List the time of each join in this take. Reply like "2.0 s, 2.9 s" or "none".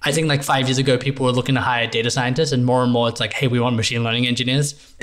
none